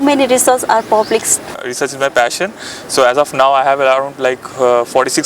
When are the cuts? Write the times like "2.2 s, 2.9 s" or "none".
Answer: 1.7 s